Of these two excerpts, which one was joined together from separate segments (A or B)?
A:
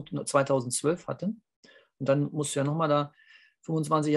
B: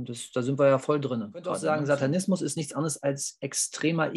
B